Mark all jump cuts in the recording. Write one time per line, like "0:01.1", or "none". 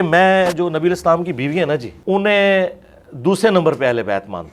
0:01.9